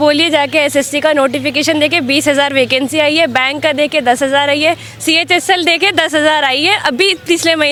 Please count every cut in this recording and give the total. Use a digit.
0